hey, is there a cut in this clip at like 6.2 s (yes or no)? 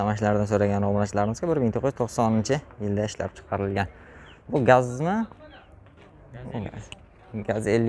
no